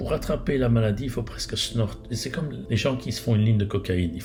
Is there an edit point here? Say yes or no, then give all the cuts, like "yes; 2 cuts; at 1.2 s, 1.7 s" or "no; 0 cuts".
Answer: no; 0 cuts